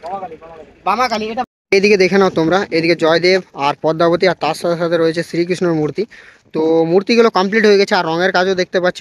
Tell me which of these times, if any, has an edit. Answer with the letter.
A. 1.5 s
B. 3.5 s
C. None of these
A